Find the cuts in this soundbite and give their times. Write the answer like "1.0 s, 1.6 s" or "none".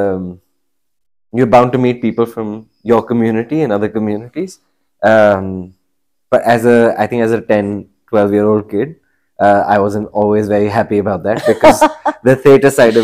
none

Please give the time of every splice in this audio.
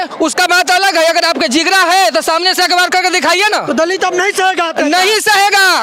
none

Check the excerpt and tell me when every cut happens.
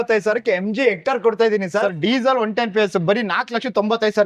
1.9 s

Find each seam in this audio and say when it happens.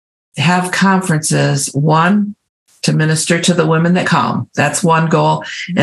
4.1 s

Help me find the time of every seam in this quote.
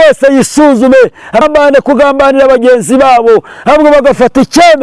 1.4 s

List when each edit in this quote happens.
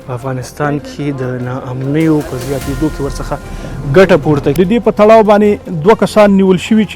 4.6 s

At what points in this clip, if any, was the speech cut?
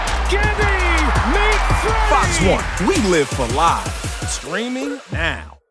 none

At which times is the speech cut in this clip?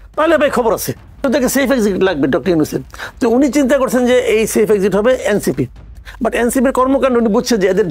1.2 s

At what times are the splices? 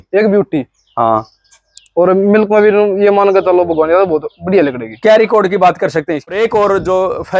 6.3 s

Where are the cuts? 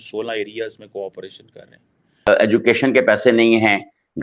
2.3 s

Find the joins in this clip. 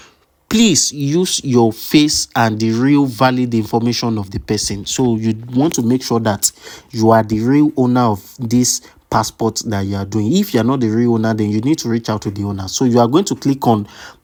none

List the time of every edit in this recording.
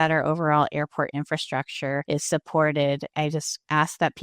2.0 s, 3.2 s

